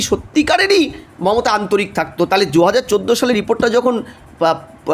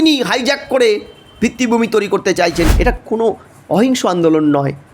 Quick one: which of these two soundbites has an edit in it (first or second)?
second